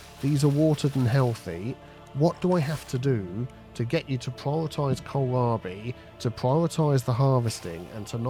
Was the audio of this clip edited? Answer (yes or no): no